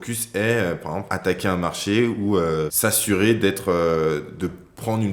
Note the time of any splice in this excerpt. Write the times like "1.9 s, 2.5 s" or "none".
1.1 s, 2.7 s